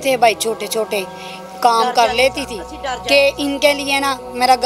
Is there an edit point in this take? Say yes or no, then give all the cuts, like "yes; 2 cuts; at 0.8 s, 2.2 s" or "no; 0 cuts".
no; 0 cuts